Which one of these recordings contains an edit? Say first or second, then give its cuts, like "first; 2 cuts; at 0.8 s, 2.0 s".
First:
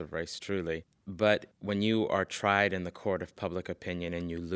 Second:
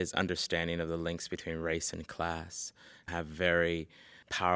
first; 1 cut; at 1.0 s